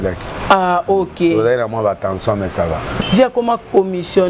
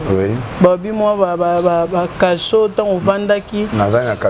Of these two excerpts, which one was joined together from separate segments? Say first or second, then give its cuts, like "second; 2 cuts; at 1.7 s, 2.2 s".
first; 1 cut; at 2.9 s